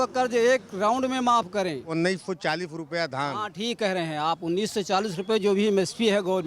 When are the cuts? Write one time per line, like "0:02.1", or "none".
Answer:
0:01.9